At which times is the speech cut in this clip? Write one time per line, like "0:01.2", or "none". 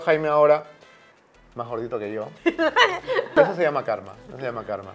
0:03.4